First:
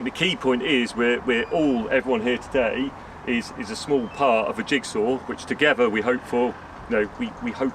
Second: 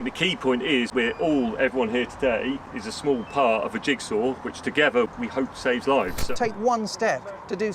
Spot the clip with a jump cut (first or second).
second